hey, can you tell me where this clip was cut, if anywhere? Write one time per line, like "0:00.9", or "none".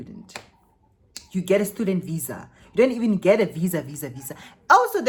none